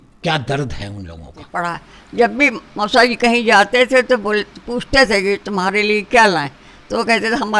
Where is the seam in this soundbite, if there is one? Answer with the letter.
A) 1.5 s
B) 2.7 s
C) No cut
A